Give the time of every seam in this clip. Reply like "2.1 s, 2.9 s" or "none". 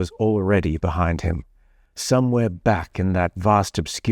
none

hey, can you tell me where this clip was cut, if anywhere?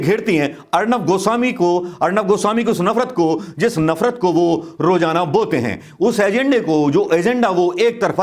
none

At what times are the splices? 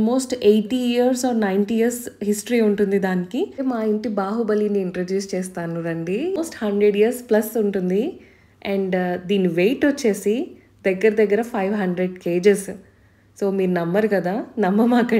3.6 s, 6.4 s

